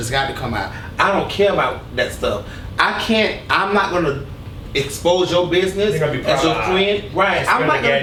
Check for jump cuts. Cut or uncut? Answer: uncut